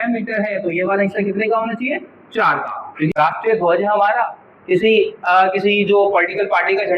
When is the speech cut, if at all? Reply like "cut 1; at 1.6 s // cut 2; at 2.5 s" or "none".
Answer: cut 1; at 3.1 s